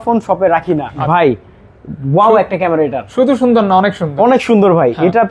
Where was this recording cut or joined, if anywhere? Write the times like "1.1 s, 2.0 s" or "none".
0.9 s